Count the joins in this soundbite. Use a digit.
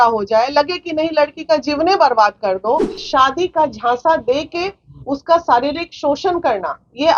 1